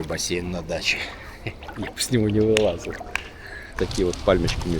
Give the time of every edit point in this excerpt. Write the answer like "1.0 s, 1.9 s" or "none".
3.7 s